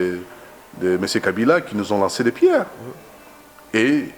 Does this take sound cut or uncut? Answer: uncut